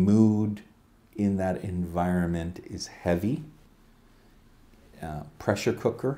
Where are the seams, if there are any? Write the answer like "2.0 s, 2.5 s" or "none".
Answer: none